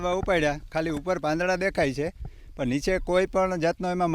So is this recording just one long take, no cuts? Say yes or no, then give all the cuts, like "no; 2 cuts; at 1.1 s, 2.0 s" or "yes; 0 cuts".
yes; 0 cuts